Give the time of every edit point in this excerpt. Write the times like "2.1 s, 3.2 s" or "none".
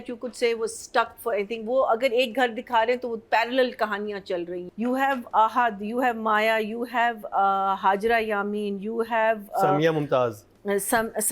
4.6 s